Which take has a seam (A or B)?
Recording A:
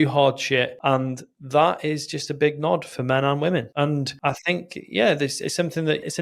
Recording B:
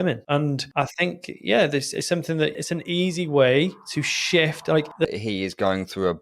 B